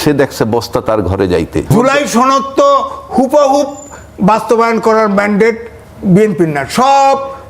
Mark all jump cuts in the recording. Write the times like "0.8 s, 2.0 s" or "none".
1.7 s